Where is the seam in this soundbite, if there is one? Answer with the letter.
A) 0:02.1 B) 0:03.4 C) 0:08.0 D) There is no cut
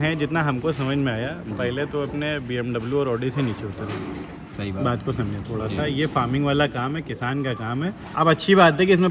C